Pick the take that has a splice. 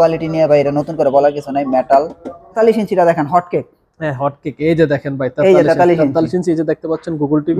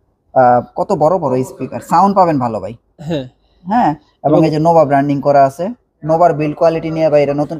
first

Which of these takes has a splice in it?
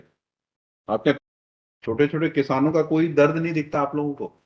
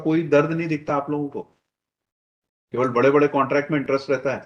first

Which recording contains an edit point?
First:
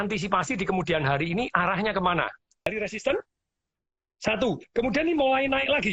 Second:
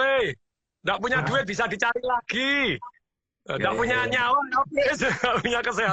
first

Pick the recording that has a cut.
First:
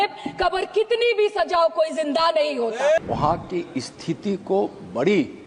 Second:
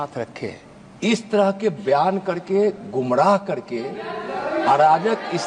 first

